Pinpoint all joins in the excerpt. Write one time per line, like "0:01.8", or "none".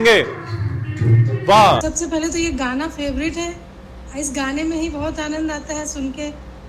0:01.8